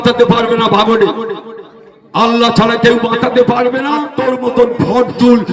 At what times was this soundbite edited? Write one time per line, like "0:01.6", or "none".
0:04.0

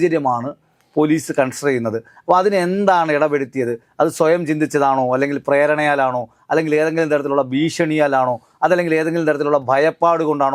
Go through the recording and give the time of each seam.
none

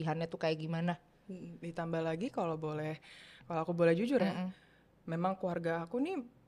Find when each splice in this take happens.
none

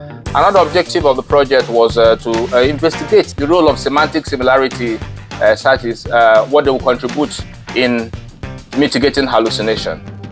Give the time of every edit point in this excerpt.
0:03.3

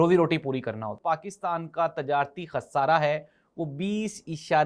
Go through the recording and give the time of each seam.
0:01.0

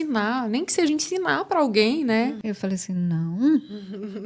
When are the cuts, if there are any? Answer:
0:02.4

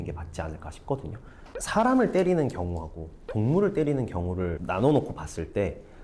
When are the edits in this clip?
0:01.2

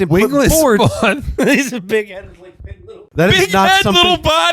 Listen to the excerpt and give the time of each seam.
0:03.1

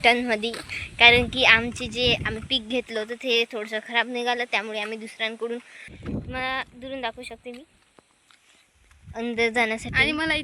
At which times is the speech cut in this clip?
0:05.9

